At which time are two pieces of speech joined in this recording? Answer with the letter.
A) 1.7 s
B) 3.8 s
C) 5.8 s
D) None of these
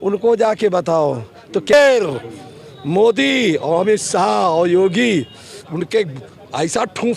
A